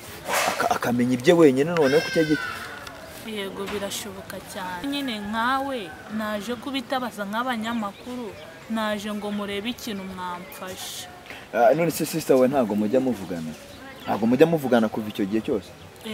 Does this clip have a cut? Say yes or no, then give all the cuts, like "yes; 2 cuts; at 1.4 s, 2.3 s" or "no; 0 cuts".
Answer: yes; 1 cut; at 4.8 s